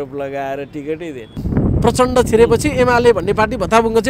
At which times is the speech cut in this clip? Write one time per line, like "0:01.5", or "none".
0:01.3